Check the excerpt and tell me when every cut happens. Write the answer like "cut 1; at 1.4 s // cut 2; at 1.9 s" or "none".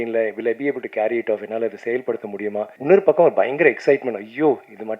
cut 1; at 2.7 s